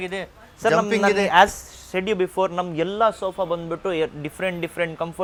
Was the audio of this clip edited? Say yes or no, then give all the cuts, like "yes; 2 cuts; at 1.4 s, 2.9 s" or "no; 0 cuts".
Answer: no; 0 cuts